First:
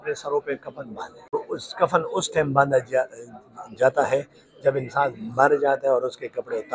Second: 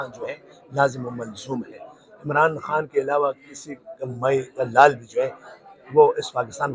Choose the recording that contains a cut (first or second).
first